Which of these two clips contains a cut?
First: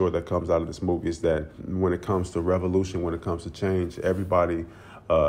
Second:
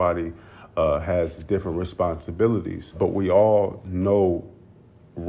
second; 1 cut; at 3.0 s

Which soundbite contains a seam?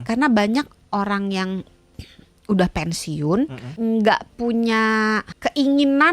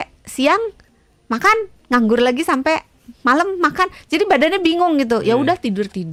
first; 2 cuts; at 3.6 s, 5.3 s

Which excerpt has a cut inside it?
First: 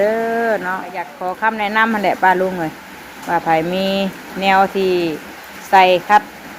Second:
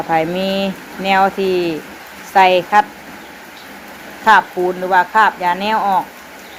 first; 1 cut; at 1.2 s

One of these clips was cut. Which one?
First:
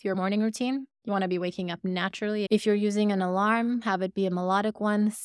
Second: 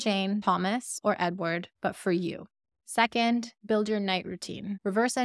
first; 1 cut; at 2.5 s

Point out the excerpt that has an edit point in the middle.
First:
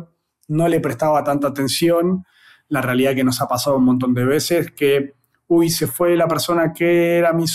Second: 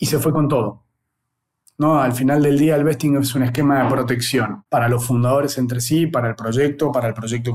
second; 1 cut; at 4.6 s

